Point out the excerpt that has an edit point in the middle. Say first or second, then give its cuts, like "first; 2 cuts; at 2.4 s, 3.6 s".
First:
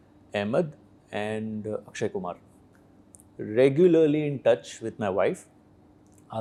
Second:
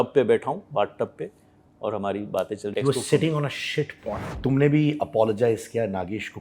second; 2 cuts; at 2.7 s, 4.2 s